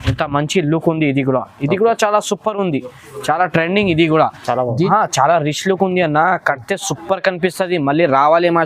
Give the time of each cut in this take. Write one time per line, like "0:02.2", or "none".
0:04.9